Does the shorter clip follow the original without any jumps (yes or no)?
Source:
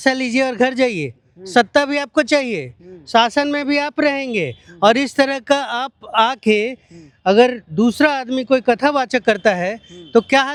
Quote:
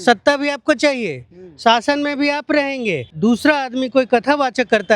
no